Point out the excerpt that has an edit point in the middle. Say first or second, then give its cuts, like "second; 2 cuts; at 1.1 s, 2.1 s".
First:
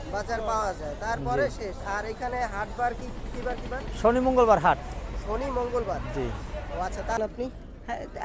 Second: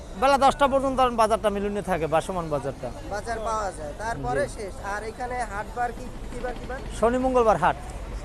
first; 1 cut; at 7.2 s